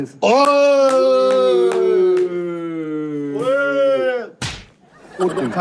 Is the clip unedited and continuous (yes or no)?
yes